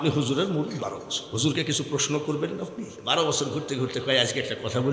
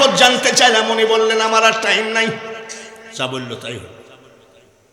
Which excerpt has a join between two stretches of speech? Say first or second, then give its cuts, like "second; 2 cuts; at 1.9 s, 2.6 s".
first; 2 cuts; at 1.1 s, 2.9 s